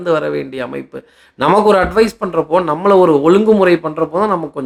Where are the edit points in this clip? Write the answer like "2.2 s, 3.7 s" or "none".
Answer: none

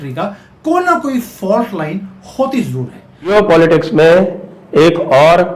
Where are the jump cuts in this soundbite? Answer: 3.3 s

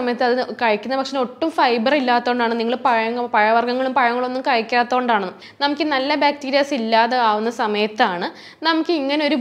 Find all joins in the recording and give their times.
5.4 s

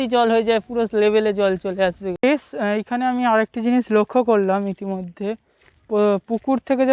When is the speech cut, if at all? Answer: 2.1 s

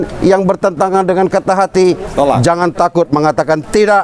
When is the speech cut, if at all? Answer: none

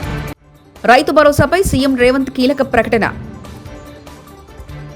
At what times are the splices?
none

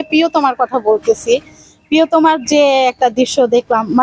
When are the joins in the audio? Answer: none

